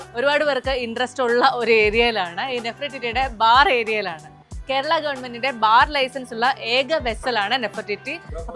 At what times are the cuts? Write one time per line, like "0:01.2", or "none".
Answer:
none

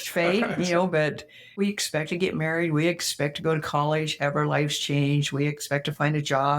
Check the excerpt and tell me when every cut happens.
0:01.5

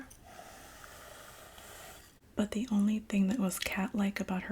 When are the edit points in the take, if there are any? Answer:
0:02.2

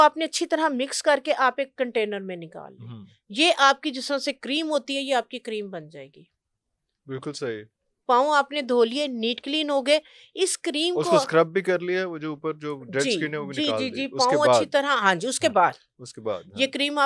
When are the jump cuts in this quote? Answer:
none

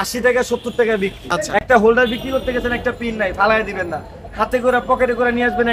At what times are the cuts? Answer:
0:01.3

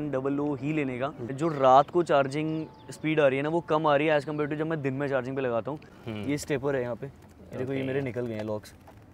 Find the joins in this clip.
0:01.3
0:05.9

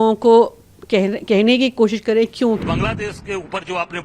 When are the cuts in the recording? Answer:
0:02.6

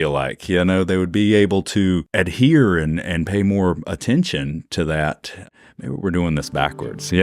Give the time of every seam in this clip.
0:02.1
0:05.4

